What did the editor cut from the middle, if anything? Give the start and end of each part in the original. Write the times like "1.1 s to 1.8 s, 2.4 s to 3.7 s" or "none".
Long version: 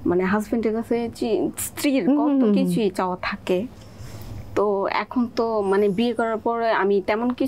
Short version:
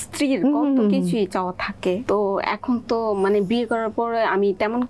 3.7 s to 4.5 s

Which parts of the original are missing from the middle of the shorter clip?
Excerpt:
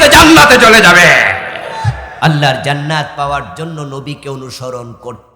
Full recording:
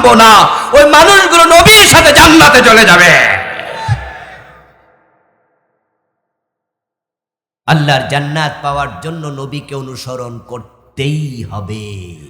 4.1 s to 7.5 s

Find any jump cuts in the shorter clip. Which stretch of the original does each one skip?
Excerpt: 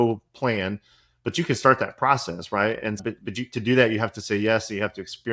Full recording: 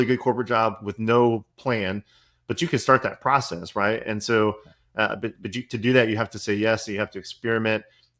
4.2 s to 5.2 s

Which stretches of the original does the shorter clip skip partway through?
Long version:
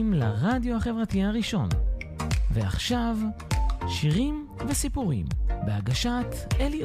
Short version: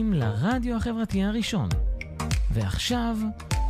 none

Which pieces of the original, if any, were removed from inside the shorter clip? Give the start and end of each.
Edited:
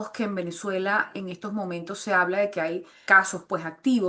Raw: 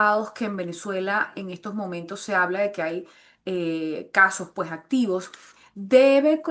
3.2 s to 4.0 s

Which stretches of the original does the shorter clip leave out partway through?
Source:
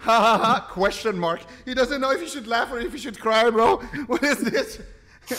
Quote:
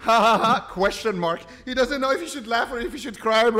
none

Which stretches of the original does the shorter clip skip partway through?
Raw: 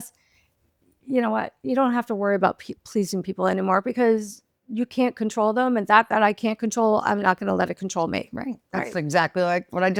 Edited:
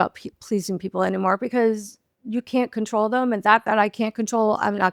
none

